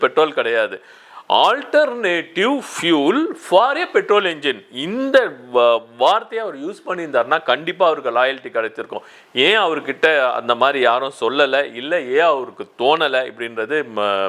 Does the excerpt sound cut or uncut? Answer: uncut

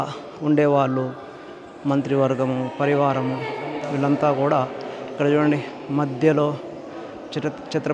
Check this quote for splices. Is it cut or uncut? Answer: uncut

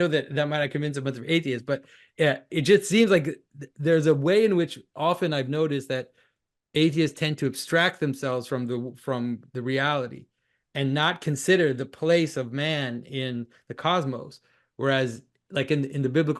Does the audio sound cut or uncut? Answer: uncut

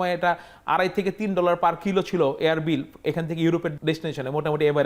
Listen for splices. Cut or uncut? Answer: cut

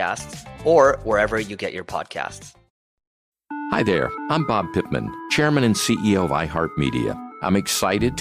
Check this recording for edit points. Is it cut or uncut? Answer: cut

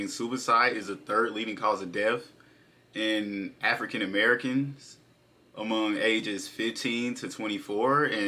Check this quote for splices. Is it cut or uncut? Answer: uncut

